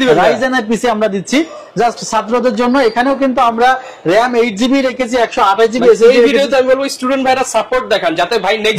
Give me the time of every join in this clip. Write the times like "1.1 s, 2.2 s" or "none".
none